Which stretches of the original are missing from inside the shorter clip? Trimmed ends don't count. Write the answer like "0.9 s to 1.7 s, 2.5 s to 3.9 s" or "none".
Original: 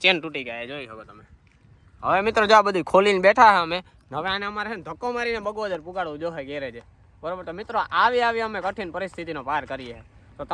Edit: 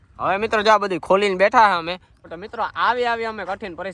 4.0 s to 7.3 s

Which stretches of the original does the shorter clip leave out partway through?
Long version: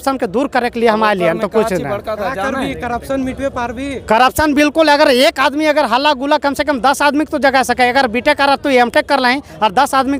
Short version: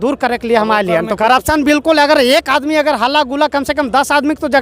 1.5 s to 4.1 s

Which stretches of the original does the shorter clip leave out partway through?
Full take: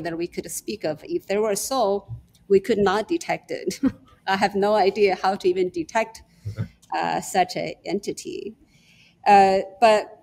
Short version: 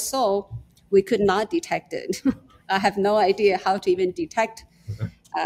none

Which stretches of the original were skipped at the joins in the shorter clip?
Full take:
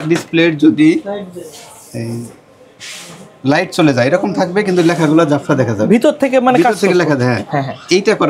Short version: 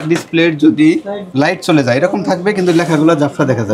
1.2 s to 3.3 s

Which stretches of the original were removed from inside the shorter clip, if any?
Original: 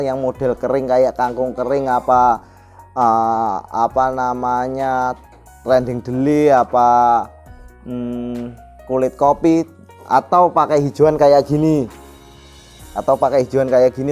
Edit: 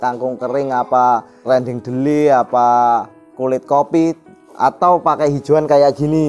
2.5 s to 5.5 s, 7.4 s to 8.7 s

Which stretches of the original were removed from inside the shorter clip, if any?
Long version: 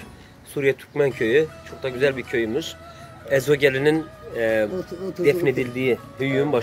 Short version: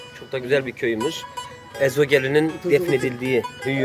4.1 s to 5.1 s

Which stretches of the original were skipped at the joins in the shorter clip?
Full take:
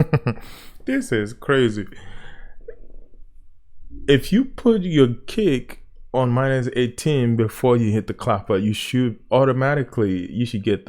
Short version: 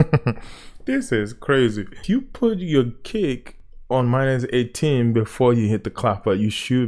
2.0 s to 4.2 s

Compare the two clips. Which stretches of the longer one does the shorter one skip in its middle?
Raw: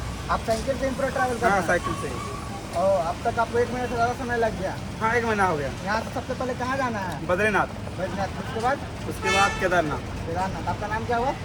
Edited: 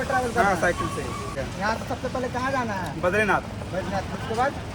2.5 s to 5.7 s

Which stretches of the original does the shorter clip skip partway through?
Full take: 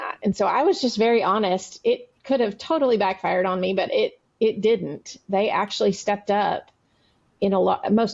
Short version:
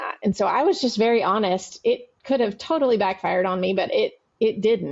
none

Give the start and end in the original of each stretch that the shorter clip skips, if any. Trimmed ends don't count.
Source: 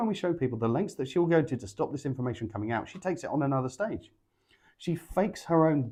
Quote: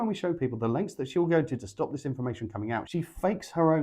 2.9 s to 4.8 s

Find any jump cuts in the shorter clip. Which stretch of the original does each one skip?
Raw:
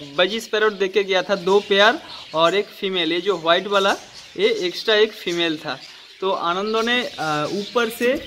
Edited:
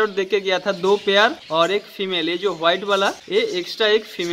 2.0 s to 2.2 s, 4.0 s to 4.3 s

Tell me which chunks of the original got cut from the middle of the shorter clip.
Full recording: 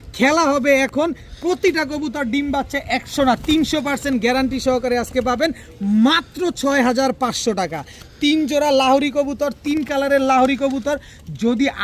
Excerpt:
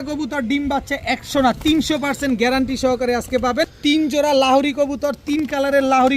5.6 s to 8.1 s

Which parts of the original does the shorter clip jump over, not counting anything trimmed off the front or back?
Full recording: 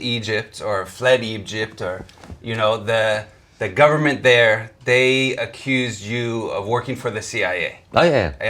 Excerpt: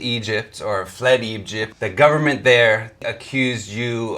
1.6 s to 3.4 s, 4.8 s to 5.3 s

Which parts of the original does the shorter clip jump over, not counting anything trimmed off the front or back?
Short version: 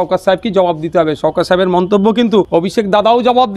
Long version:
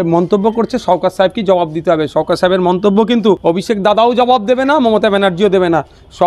none

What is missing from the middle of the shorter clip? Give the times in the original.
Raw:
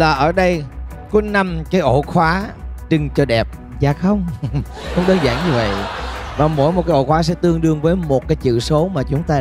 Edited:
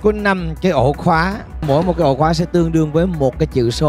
2.7 s to 6.5 s

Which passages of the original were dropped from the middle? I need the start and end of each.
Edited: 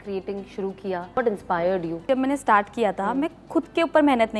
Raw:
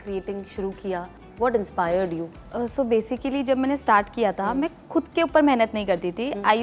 1.2 s to 1.4 s, 2.3 s to 3.4 s

